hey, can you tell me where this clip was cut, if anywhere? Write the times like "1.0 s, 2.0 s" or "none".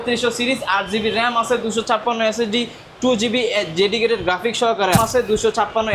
5.0 s